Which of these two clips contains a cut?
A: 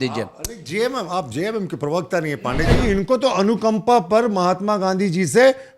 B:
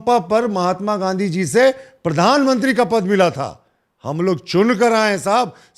A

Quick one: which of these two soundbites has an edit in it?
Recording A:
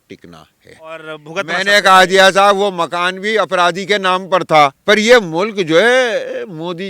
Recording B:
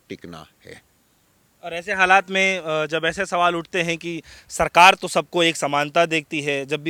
A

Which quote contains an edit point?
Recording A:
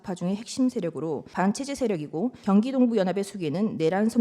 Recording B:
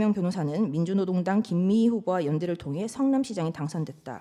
A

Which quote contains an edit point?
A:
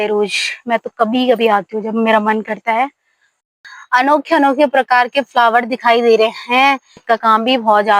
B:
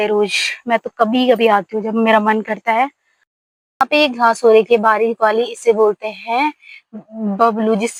A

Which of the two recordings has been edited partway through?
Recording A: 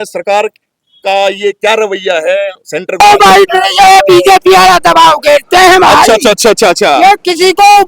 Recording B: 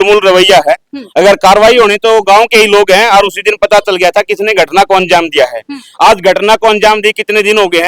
A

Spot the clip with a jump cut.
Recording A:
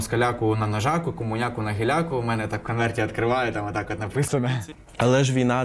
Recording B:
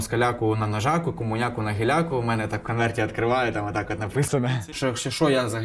B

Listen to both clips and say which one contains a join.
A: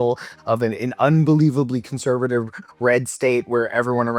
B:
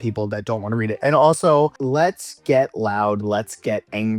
B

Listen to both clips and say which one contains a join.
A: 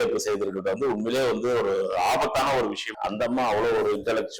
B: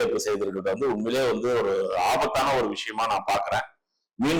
A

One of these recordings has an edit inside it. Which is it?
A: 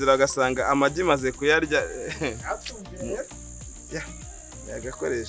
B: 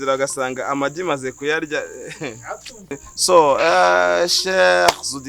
B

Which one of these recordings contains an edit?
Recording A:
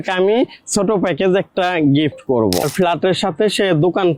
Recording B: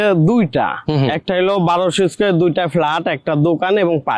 A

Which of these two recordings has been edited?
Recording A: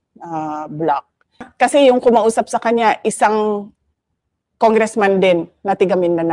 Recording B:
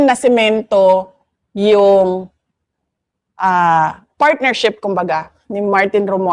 A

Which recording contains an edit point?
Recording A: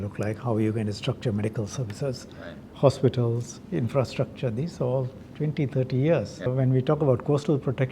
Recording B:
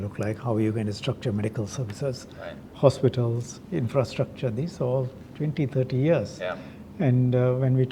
A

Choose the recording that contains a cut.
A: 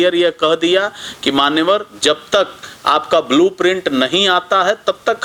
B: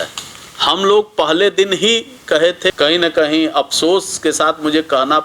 B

